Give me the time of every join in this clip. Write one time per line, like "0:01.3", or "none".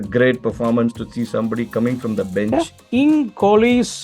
0:02.8